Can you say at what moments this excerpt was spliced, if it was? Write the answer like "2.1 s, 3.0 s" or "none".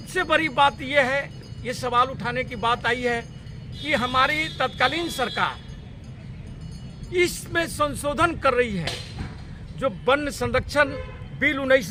none